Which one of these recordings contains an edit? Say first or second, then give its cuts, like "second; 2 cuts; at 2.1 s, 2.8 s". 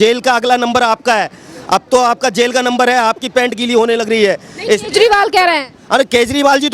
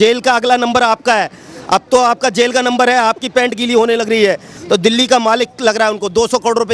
second; 1 cut; at 4.5 s